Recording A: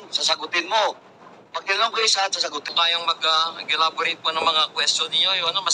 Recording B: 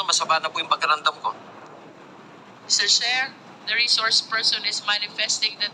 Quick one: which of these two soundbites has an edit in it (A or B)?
A